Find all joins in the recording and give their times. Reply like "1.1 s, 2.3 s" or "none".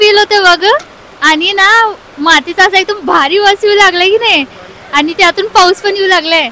none